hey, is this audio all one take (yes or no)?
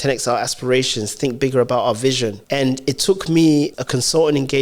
no